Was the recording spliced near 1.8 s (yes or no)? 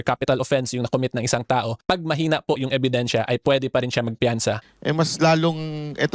no